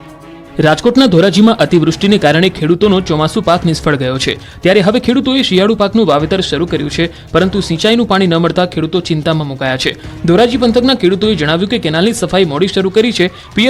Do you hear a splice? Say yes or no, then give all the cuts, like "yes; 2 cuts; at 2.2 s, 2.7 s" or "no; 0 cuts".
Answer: no; 0 cuts